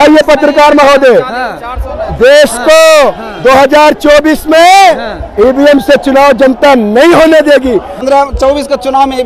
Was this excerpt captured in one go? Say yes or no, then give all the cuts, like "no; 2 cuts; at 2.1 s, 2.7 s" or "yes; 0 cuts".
no; 1 cut; at 8.0 s